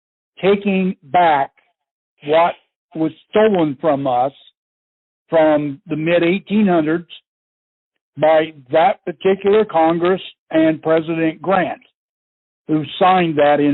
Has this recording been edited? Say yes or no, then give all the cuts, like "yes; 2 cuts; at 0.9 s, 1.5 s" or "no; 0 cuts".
no; 0 cuts